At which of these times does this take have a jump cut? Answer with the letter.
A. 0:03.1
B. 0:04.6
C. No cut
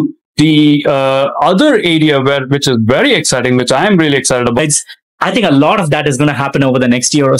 B